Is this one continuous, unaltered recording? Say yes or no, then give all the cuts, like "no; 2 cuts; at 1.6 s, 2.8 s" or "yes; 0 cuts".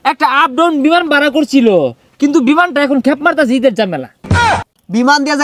no; 1 cut; at 4.3 s